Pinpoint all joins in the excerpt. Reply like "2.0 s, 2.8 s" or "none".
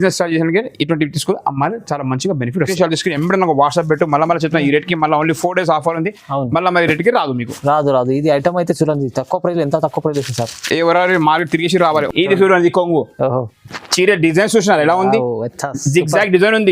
2.7 s, 12.1 s